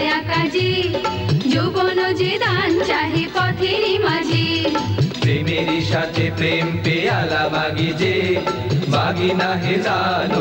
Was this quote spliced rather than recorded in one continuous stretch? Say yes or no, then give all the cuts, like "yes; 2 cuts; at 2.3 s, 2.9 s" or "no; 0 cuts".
no; 0 cuts